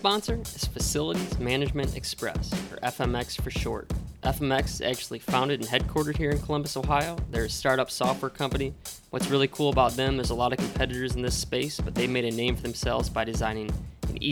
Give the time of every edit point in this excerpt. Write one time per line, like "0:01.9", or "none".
none